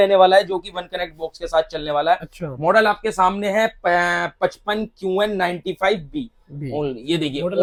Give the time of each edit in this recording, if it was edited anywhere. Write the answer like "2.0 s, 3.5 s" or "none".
none